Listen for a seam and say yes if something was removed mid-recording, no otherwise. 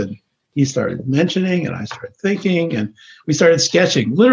no